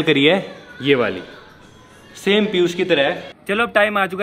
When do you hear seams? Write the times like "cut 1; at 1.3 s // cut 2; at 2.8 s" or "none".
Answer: cut 1; at 3.3 s